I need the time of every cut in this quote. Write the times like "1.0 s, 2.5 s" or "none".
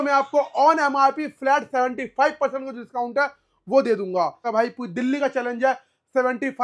none